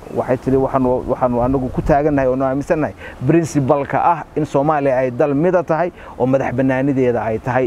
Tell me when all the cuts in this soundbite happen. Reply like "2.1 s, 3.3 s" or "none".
none

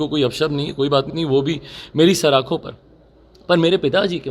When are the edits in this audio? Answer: none

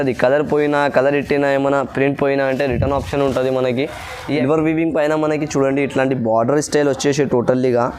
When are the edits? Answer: 4.4 s

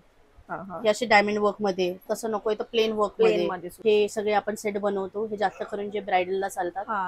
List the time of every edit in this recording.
3.7 s

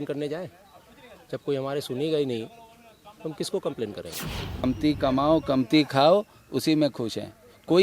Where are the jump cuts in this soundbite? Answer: 4.6 s

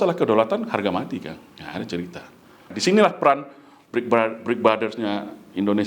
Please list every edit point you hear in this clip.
2.7 s

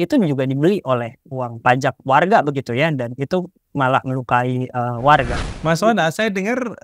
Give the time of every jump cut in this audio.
5.4 s

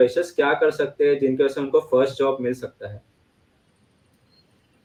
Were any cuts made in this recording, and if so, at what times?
none

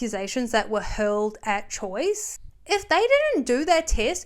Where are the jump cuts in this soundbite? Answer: 2.3 s

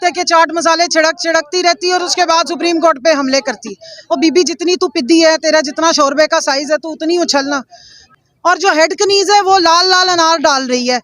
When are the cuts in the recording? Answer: 8.1 s

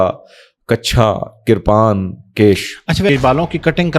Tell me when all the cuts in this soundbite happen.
3.1 s

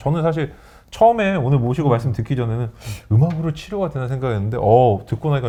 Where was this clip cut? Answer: none

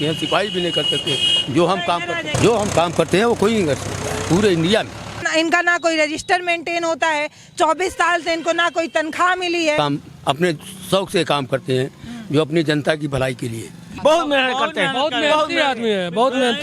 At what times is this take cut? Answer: 2.3 s, 5.3 s, 9.8 s, 13.8 s

